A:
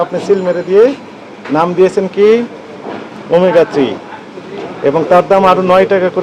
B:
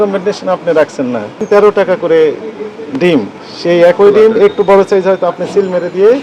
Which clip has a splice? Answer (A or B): B